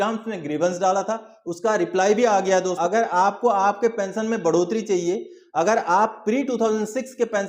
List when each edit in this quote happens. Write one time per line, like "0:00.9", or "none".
0:02.8